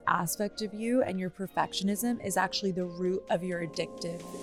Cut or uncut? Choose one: uncut